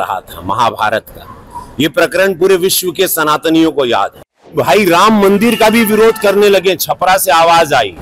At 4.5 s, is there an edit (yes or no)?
yes